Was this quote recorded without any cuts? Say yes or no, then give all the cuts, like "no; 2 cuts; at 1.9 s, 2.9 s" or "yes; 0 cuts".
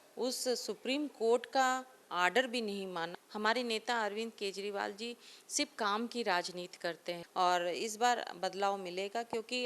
no; 2 cuts; at 3.2 s, 7.2 s